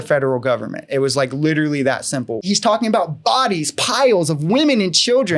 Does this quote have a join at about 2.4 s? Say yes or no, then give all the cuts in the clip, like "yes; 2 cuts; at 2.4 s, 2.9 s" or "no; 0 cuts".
yes; 1 cut; at 2.4 s